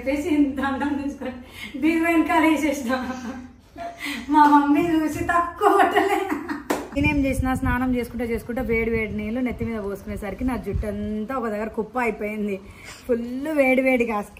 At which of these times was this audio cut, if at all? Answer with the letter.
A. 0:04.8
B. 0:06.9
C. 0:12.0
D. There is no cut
B